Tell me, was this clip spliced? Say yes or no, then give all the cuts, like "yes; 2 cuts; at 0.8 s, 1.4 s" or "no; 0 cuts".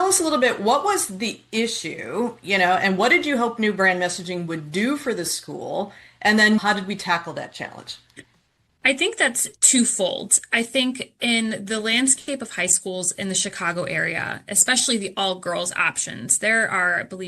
yes; 1 cut; at 6.6 s